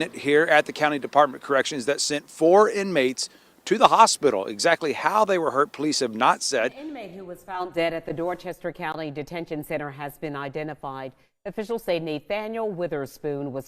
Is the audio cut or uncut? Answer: cut